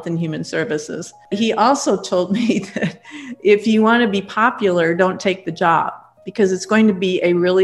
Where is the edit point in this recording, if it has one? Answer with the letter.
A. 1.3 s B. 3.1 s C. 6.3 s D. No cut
A